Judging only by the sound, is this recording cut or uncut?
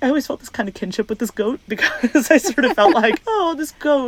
uncut